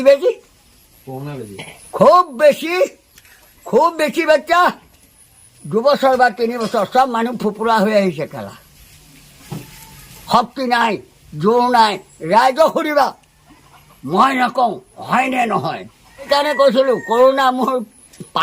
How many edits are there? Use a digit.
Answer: 1